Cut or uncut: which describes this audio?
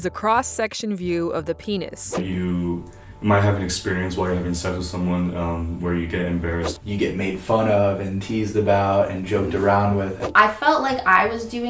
cut